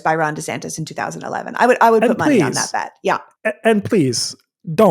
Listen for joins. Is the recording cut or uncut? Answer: uncut